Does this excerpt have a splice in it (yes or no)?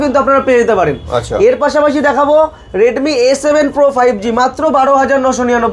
no